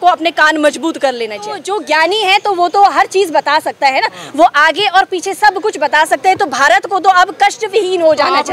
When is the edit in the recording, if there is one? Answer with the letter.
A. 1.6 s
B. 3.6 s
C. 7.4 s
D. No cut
A